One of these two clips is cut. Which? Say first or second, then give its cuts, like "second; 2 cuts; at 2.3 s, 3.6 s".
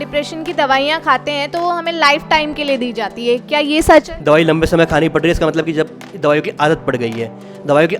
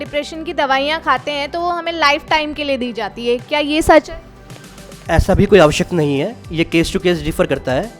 first; 1 cut; at 4.1 s